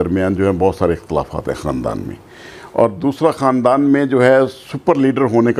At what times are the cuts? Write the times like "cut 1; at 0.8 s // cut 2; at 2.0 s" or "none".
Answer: none